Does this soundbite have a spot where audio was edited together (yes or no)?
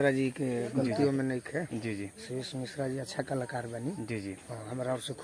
no